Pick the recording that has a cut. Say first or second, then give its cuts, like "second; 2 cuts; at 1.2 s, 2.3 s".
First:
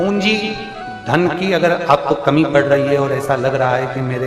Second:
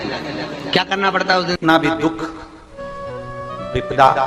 second; 1 cut; at 1.5 s